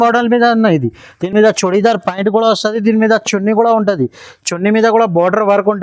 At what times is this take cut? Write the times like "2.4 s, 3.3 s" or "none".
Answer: none